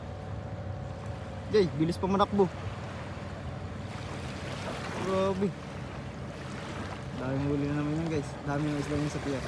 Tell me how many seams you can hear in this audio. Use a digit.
0